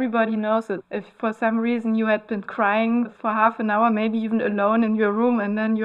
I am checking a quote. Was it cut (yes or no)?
yes